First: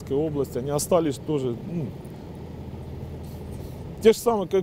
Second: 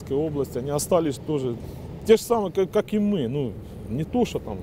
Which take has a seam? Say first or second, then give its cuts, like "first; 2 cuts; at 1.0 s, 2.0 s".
second; 1 cut; at 1.6 s